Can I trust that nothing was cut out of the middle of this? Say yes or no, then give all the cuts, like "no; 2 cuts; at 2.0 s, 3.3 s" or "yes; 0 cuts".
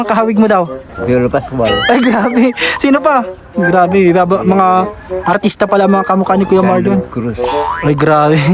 no; 1 cut; at 0.9 s